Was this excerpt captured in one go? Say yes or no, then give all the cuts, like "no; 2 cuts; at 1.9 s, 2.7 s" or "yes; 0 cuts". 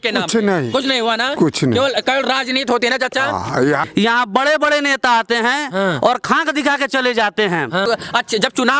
no; 2 cuts; at 3.9 s, 7.9 s